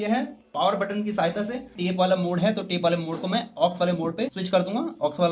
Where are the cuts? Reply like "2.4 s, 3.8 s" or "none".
1.7 s